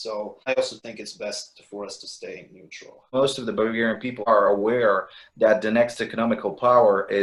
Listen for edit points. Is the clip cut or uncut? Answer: uncut